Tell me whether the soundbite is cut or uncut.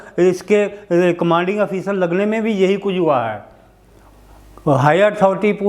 uncut